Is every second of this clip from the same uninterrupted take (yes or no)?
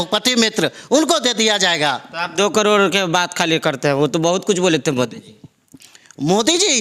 yes